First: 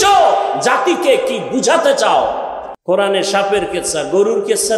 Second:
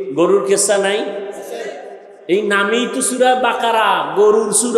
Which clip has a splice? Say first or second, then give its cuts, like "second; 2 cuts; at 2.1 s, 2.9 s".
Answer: first; 1 cut; at 2.7 s